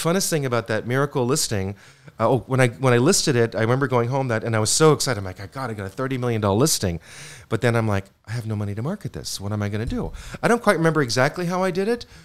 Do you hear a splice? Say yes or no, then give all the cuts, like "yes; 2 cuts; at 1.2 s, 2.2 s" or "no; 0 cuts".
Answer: no; 0 cuts